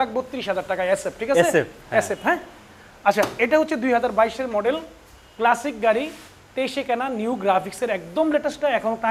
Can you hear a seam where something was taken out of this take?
no; 0 cuts

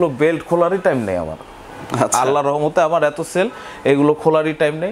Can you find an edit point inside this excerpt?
no; 0 cuts

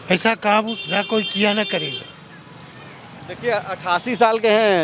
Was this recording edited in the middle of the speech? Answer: no; 0 cuts

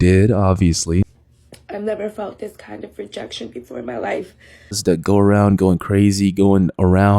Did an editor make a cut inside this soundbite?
yes; 2 cuts; at 1.1 s, 4.8 s

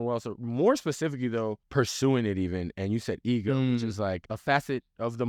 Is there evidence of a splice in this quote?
yes; 2 cuts; at 1.6 s, 4.3 s

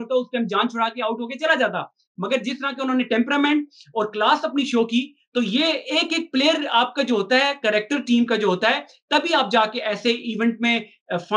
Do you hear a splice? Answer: no; 0 cuts

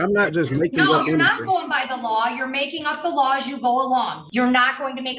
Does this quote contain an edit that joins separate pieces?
yes; 1 cut; at 4.2 s

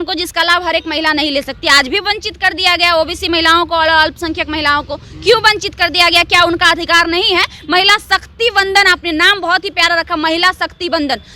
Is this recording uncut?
yes; 0 cuts

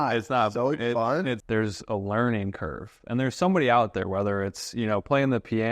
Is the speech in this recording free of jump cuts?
no; 1 cut; at 1.4 s

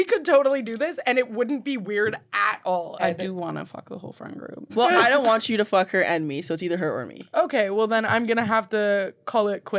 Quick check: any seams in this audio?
yes; 2 cuts; at 3.0 s, 4.6 s

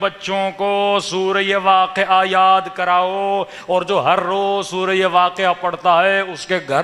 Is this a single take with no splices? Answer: yes; 0 cuts

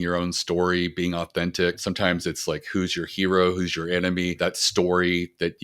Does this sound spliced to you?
yes; 2 cuts; at 1.8 s, 4.4 s

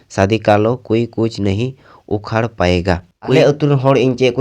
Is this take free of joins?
no; 1 cut; at 3.4 s

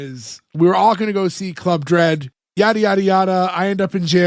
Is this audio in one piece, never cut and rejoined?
no; 1 cut; at 2.4 s

